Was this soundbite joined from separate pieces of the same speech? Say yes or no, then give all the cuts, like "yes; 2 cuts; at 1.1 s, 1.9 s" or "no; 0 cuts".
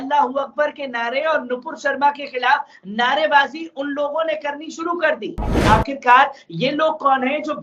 yes; 1 cut; at 5.6 s